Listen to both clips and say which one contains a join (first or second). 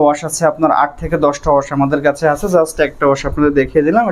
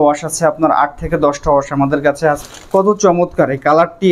second